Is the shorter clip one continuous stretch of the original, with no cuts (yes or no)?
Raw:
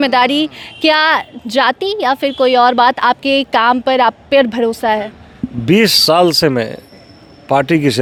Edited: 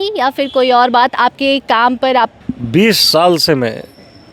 no